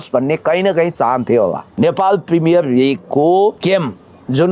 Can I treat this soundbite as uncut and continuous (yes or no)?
no